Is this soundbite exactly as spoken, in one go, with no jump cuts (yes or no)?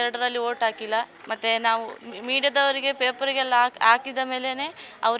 no